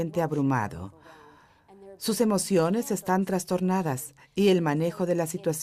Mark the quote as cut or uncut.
cut